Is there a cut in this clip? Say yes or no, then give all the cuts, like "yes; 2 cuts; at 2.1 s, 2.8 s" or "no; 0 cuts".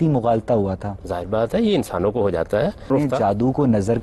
yes; 1 cut; at 2.9 s